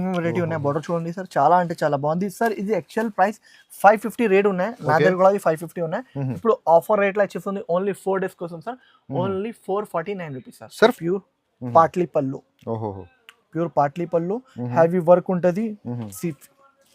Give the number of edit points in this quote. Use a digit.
1